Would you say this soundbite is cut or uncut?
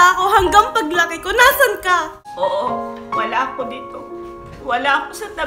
cut